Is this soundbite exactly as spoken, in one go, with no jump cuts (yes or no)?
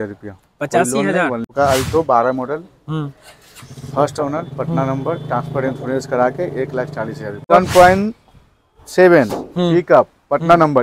no